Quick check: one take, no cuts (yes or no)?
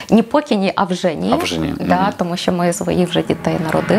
no